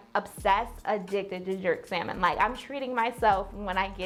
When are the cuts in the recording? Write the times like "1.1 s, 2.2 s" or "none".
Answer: none